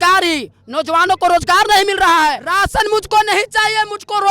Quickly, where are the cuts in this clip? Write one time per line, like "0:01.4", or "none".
0:02.4